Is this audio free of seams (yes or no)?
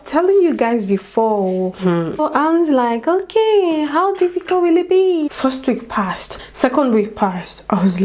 no